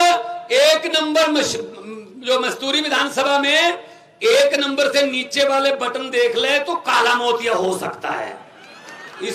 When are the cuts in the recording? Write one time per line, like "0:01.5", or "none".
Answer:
none